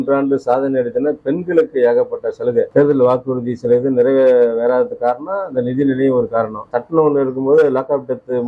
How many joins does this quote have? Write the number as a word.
two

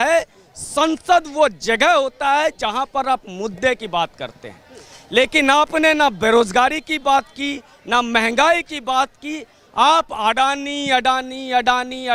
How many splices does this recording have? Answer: zero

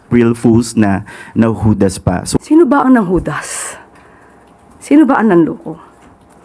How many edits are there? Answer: one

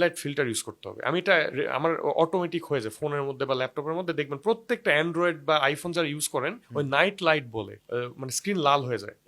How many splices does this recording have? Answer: zero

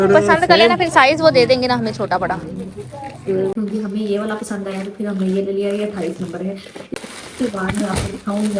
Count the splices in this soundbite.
two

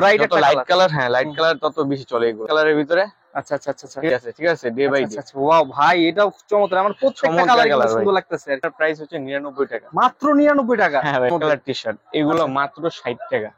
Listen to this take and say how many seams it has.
four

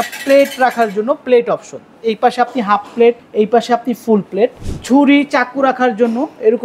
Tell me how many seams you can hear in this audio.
two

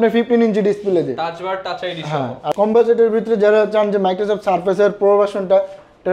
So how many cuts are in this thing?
one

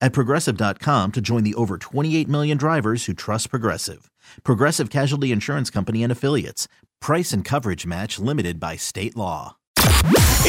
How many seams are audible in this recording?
one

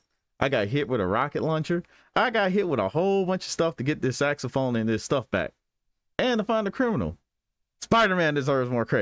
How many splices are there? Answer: zero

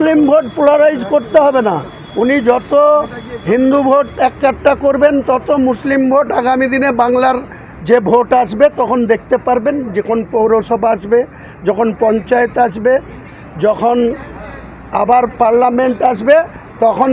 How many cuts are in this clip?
zero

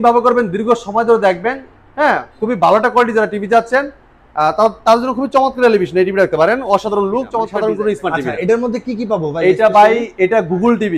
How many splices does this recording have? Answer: one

